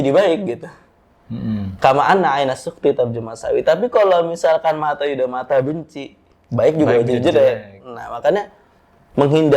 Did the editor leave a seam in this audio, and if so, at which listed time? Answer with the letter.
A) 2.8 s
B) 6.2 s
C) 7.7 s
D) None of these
D